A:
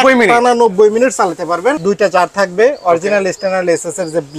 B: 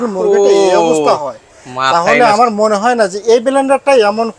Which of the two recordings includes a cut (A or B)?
A